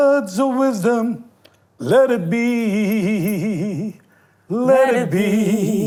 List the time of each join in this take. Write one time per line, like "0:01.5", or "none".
none